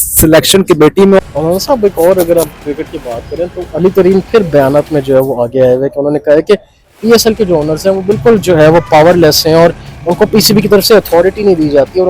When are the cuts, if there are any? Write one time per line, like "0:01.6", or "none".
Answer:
0:01.2